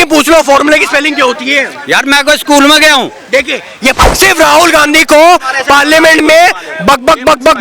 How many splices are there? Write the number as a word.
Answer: one